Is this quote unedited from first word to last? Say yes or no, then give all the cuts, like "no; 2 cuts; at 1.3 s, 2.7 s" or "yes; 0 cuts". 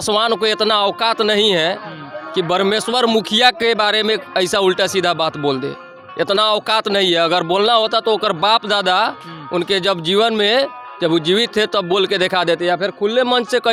yes; 0 cuts